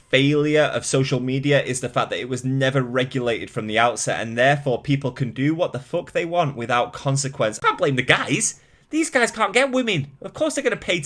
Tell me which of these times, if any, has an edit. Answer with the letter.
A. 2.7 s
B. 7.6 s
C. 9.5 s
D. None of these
B